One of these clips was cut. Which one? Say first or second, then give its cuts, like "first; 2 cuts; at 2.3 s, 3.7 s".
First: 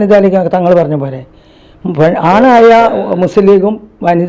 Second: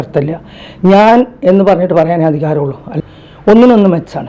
second; 1 cut; at 3.0 s